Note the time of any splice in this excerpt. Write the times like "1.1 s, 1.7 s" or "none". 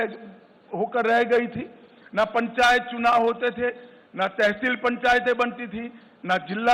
none